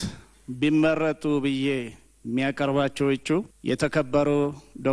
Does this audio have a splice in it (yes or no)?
yes